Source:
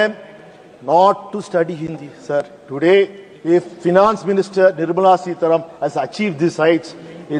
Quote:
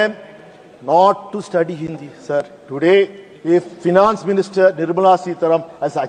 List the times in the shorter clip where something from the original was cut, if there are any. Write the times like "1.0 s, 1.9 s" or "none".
none